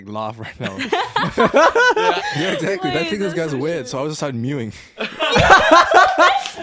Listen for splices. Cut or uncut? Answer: cut